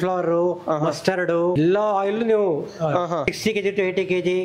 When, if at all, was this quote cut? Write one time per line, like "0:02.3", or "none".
0:01.5
0:03.3